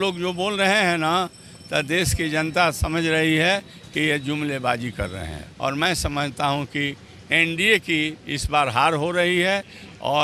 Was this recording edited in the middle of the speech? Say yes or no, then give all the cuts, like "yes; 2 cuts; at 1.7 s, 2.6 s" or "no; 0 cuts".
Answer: yes; 1 cut; at 5.4 s